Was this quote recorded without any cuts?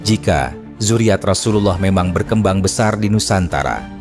yes; 0 cuts

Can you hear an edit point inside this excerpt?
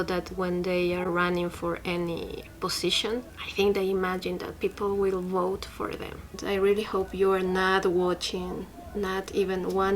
yes; 3 cuts; at 2.5 s, 3.4 s, 6.4 s

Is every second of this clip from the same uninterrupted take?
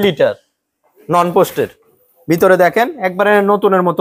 yes; 0 cuts

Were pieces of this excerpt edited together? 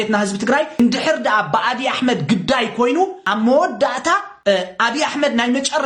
yes; 3 cuts; at 0.8 s, 3.2 s, 4.3 s

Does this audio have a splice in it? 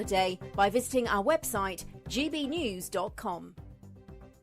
yes; 1 cut; at 3.5 s

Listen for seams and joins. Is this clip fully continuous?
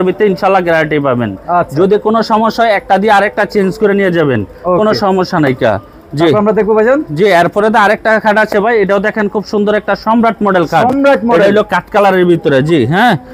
yes; 0 cuts

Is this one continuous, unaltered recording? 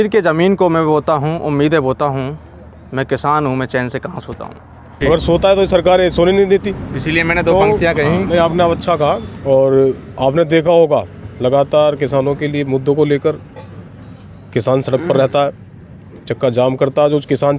no; 1 cut; at 4.9 s

